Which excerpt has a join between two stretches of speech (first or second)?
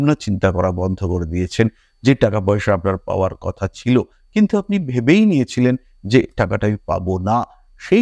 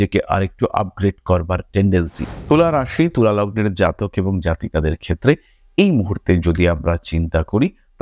second